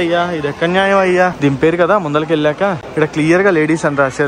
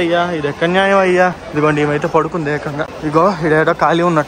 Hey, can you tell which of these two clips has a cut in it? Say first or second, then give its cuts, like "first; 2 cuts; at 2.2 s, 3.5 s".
first; 2 cuts; at 1.4 s, 2.8 s